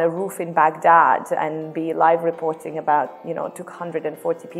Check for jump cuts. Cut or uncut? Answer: uncut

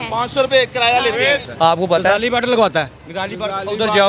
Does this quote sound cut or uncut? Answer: cut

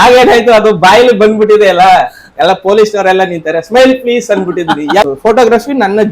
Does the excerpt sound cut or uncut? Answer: cut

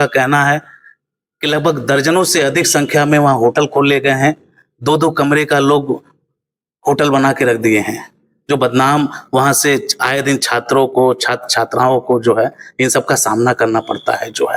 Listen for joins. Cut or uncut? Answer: uncut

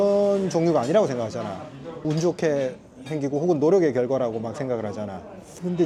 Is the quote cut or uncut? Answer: uncut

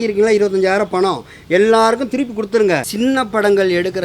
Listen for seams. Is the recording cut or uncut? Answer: cut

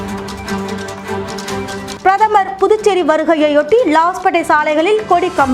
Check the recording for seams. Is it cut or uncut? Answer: cut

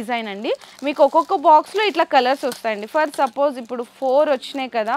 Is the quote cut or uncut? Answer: uncut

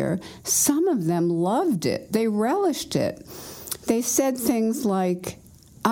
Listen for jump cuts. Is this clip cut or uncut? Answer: uncut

